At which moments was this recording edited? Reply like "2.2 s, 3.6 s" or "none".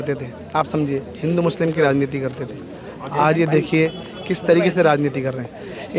none

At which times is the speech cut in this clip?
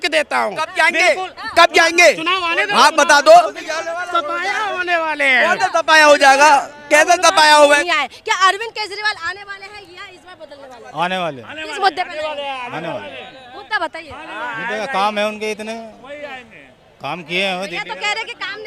7.8 s

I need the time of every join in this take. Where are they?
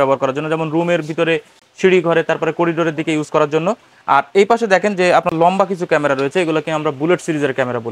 none

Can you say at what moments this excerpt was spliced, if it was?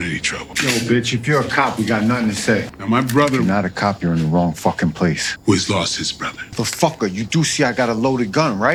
none

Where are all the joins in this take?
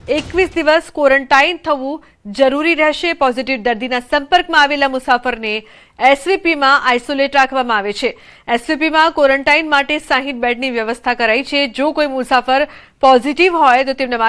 2.9 s

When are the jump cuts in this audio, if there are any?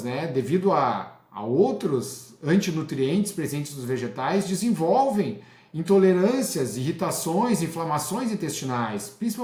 none

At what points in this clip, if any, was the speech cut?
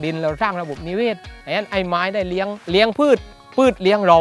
2.6 s

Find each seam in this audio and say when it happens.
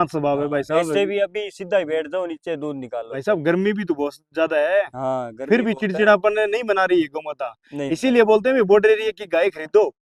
none

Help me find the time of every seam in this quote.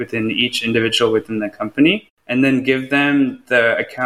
2.1 s

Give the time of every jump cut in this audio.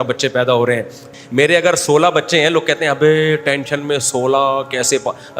1.0 s

